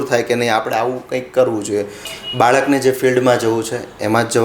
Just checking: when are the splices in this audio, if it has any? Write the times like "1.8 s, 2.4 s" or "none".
2.0 s